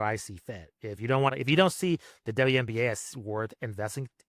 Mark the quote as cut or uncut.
cut